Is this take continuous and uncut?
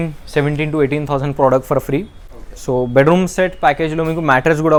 yes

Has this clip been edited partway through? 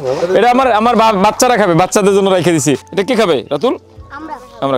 no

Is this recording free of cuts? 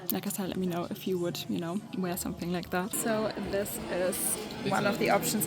no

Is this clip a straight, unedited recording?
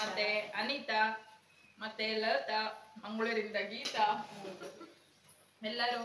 yes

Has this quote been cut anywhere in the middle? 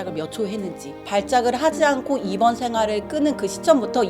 yes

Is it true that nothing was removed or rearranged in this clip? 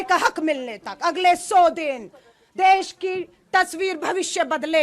yes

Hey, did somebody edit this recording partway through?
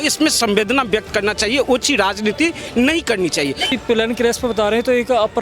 yes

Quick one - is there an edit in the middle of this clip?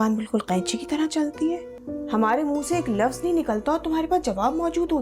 yes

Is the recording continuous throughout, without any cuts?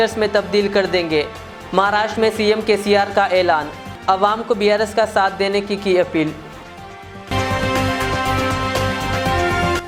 yes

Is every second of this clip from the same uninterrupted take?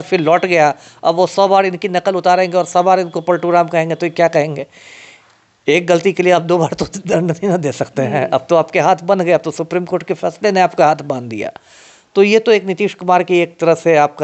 yes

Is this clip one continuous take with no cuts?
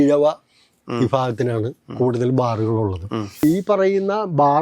no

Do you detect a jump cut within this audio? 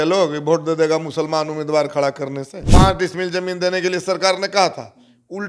yes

